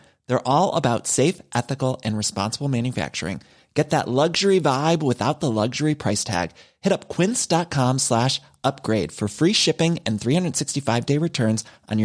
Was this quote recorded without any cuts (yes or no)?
yes